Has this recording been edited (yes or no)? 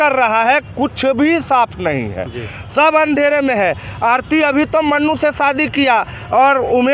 no